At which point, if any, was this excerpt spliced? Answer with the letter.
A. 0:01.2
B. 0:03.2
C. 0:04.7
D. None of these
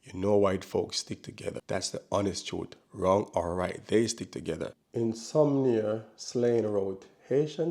C